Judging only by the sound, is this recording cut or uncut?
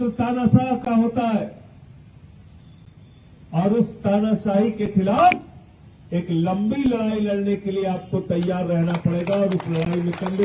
uncut